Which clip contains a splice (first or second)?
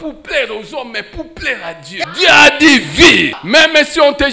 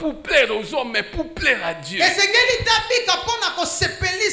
first